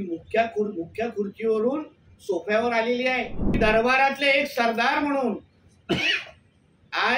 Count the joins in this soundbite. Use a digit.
1